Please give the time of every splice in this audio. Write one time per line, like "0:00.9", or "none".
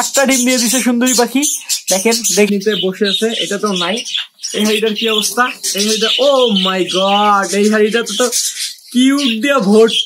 0:02.5